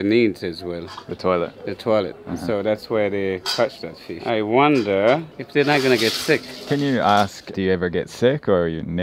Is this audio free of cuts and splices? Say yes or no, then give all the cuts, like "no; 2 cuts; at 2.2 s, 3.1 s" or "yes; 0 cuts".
yes; 0 cuts